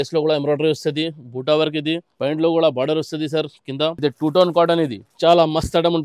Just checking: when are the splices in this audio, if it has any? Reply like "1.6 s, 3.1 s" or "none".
2.1 s, 4.0 s, 5.0 s